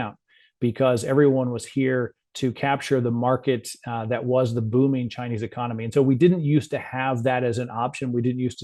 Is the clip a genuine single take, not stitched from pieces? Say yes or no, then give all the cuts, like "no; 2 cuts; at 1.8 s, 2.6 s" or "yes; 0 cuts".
yes; 0 cuts